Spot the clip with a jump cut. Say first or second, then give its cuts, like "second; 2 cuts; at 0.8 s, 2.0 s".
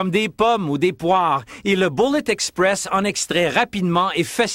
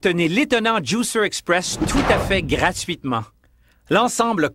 second; 1 cut; at 3.4 s